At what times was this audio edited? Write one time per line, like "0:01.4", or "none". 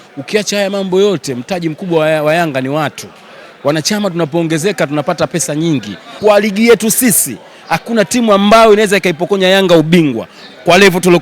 0:06.0